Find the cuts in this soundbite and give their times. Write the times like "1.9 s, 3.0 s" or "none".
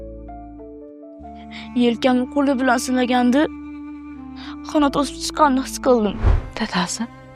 6.3 s